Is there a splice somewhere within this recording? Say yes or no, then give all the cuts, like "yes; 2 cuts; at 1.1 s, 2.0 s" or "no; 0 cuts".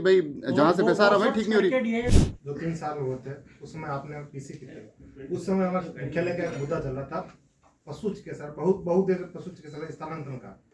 yes; 1 cut; at 2.1 s